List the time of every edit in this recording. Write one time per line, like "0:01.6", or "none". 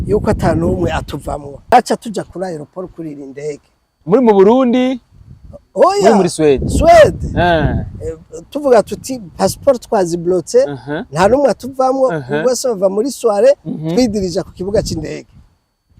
0:01.7